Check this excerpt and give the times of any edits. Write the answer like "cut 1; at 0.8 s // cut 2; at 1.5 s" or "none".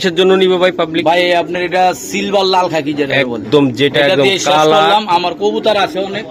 none